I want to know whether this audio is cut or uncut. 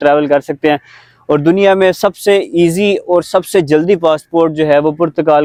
uncut